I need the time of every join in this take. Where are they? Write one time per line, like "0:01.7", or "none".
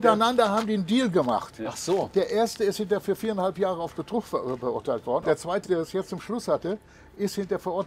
0:05.5